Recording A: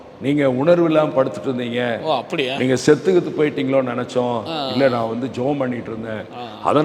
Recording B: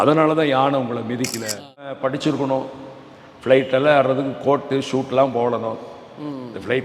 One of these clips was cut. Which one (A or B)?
B